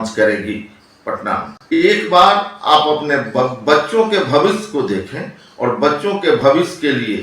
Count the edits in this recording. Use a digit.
1